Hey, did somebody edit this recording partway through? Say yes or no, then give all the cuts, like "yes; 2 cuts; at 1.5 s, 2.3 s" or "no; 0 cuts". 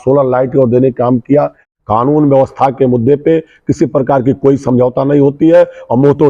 yes; 1 cut; at 1.6 s